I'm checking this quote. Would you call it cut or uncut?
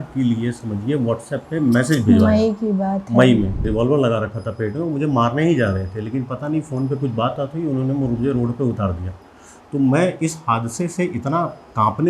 cut